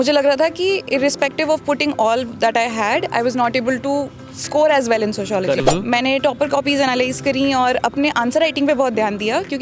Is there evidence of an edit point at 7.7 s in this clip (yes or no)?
no